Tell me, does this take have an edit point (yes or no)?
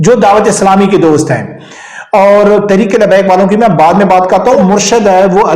yes